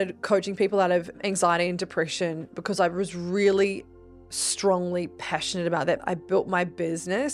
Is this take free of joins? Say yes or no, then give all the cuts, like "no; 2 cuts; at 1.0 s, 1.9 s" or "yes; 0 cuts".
no; 2 cuts; at 1.2 s, 6.0 s